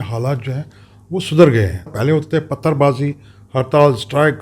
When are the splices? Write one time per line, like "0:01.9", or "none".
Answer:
0:01.9